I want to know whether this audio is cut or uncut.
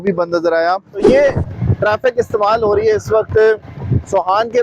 cut